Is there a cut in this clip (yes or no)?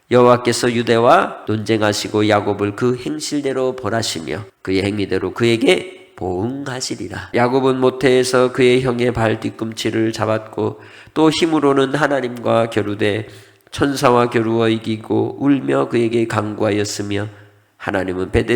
yes